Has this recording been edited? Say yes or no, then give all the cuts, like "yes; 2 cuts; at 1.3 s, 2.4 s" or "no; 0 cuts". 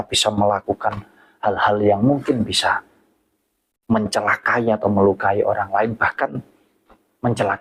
no; 0 cuts